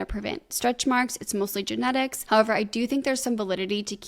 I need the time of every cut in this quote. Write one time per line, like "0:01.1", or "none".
0:02.2